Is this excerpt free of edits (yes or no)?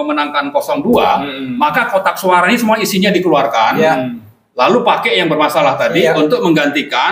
yes